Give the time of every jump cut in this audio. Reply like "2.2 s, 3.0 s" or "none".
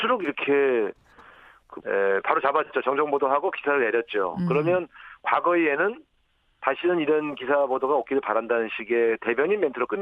none